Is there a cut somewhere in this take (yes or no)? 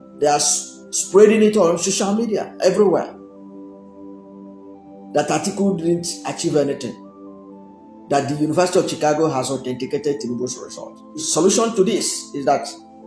yes